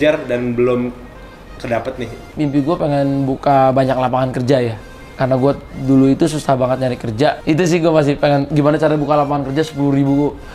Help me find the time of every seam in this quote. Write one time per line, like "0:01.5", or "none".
0:02.3
0:05.0
0:07.4